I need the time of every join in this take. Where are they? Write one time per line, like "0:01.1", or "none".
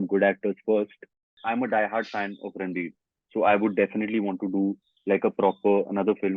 0:01.4

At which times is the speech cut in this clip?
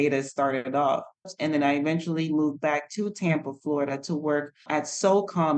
0:01.3
0:04.6

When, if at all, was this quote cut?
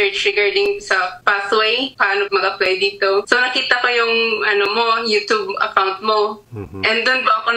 0:06.4

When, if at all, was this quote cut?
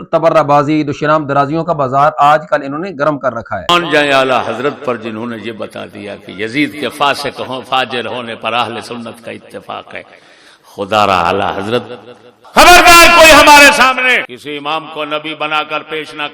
0:14.3

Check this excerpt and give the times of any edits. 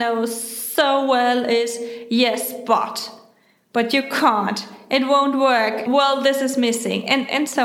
none

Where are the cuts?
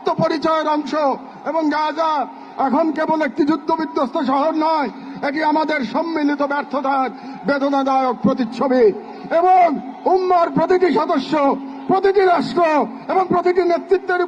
none

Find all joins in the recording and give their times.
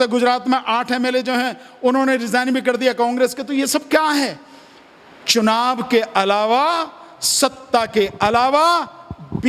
none

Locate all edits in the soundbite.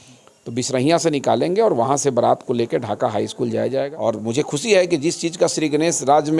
0:03.9

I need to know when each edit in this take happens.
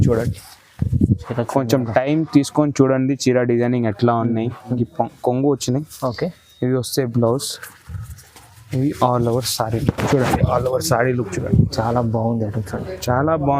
0:04.8

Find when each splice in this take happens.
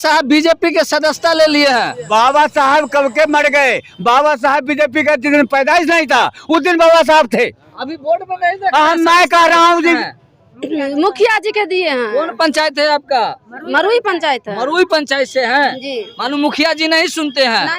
0:10.0

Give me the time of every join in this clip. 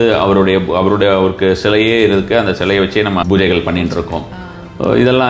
0:03.2

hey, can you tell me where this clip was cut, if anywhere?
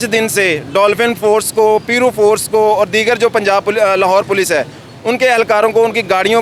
none

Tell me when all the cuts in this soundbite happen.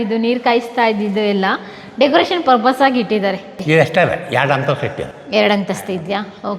0:03.6

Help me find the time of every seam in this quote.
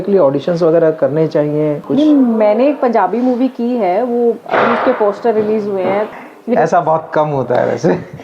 0:01.9
0:06.2

